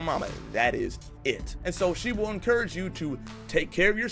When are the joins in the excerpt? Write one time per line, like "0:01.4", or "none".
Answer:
0:01.5